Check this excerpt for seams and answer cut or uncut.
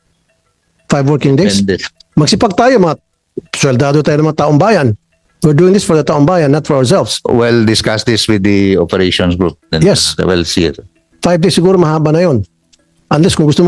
uncut